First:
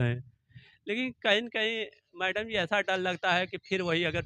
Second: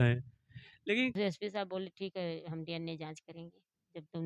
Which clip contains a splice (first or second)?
second